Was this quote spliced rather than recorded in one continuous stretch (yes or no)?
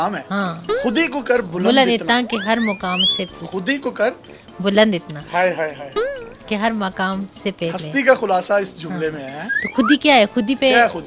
no